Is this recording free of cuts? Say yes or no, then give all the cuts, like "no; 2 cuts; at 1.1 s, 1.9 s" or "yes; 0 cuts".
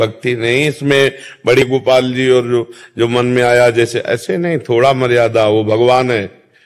no; 1 cut; at 1.6 s